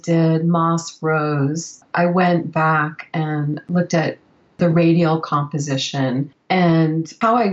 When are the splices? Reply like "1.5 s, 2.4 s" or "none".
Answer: 6.4 s

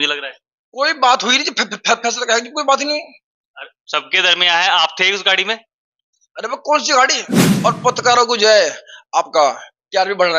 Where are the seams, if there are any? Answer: 7.4 s

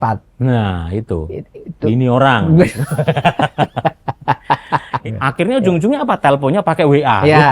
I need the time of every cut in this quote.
4.9 s

